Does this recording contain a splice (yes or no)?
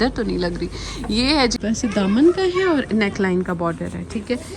yes